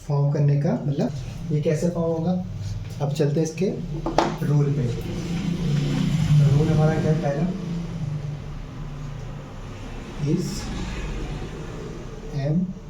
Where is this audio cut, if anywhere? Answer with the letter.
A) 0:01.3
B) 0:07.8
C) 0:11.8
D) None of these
A